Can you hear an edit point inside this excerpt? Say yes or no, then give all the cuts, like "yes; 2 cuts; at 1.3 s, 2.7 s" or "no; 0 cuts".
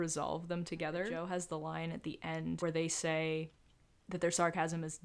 yes; 1 cut; at 1.1 s